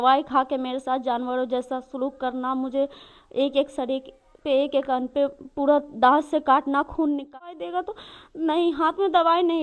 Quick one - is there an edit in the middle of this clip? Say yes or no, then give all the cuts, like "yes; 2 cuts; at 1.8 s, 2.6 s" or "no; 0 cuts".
yes; 1 cut; at 7.3 s